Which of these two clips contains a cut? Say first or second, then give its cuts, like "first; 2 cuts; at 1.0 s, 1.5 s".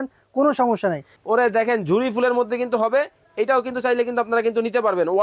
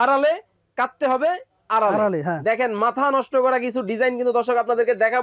first; 1 cut; at 1.1 s